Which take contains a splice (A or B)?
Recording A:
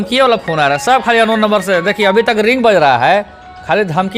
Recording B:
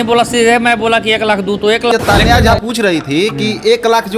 B